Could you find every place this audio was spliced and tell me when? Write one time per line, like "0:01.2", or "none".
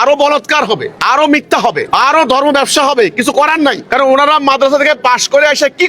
0:00.9
0:01.8
0:03.8